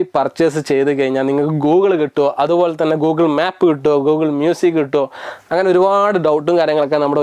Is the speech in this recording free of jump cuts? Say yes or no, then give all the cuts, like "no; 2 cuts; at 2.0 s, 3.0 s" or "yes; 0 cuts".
yes; 0 cuts